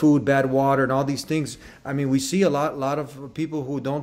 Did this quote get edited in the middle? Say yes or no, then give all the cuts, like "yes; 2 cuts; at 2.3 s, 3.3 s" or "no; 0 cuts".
no; 0 cuts